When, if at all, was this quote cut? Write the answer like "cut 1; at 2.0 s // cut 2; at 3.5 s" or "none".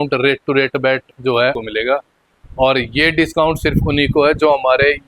cut 1; at 1.6 s